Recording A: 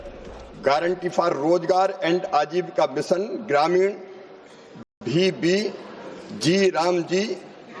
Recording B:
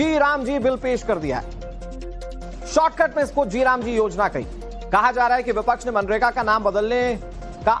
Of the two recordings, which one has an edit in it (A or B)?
B